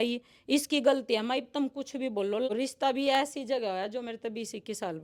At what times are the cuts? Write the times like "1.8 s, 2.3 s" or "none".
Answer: 2.5 s

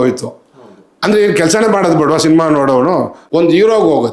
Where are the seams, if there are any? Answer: 3.2 s

